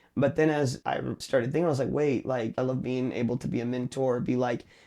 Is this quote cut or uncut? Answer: cut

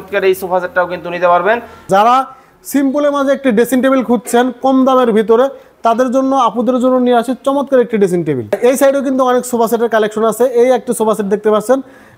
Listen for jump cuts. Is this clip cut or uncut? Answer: cut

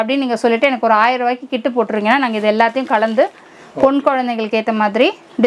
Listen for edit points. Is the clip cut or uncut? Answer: uncut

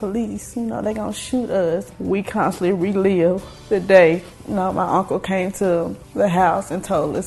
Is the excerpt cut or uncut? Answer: cut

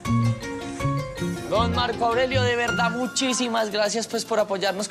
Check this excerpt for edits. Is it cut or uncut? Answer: uncut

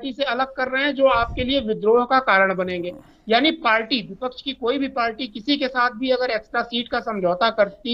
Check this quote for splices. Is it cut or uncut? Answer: uncut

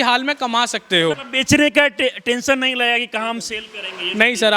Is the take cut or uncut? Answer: cut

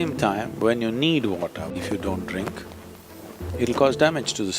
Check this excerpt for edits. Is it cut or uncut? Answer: cut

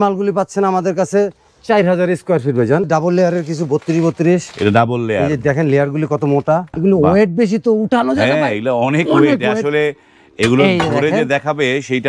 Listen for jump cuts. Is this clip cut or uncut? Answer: cut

